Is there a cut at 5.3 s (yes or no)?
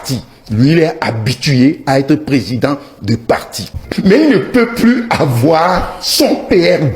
no